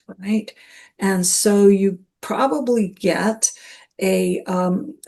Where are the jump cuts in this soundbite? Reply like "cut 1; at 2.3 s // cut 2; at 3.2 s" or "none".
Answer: none